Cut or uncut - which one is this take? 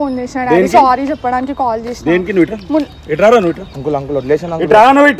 uncut